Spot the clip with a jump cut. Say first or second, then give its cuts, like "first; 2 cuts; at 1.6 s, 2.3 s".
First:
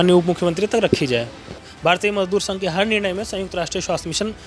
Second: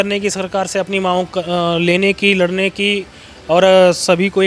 first; 1 cut; at 1.7 s